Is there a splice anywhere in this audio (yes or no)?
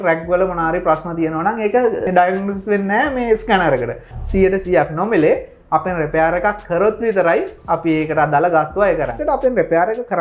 yes